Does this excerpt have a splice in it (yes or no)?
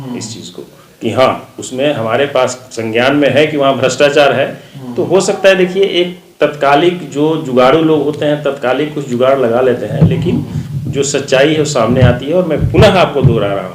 no